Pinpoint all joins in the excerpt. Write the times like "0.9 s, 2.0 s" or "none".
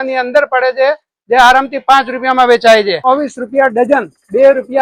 3.1 s